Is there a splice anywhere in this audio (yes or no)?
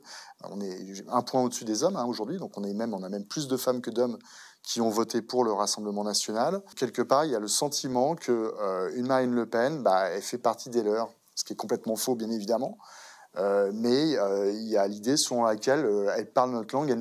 yes